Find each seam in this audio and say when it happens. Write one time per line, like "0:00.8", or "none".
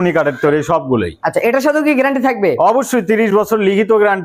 none